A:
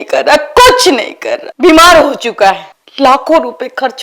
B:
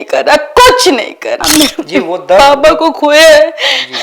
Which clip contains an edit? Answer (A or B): B